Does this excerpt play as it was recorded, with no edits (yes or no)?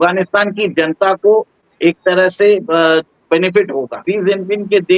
no